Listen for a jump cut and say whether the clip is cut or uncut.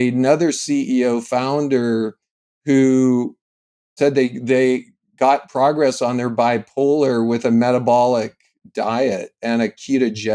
uncut